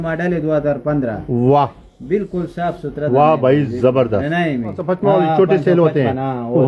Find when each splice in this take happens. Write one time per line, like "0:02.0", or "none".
0:04.9